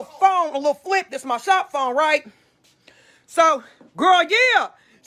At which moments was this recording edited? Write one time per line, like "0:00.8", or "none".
none